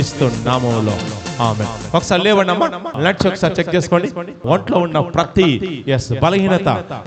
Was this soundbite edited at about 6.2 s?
no; 2 cuts; at 2.9 s, 4.4 s

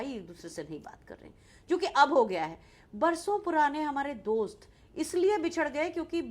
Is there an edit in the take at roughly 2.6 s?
no; 0 cuts

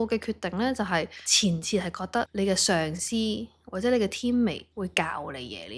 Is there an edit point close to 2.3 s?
yes; 3 cuts; at 1.2 s, 2.3 s, 4.7 s

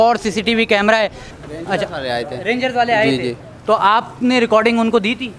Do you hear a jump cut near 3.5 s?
no; 1 cut; at 1.3 s

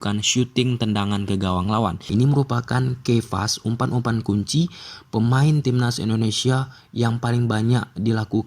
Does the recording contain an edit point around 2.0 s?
yes; 1 cut; at 2.0 s

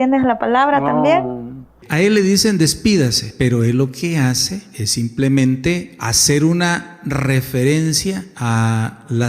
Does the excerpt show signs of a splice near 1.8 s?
yes; 1 cut; at 1.8 s

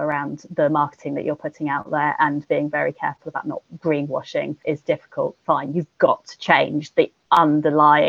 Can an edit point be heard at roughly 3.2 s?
no; 1 cut; at 4.9 s

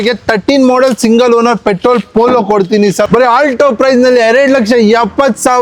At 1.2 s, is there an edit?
no; 1 cut; at 3.1 s

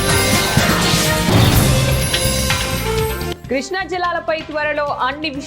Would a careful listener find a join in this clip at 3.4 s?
yes; 1 cut; at 3.4 s

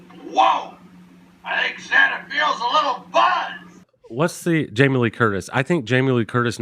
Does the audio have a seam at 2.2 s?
no; 1 cut; at 3.9 s

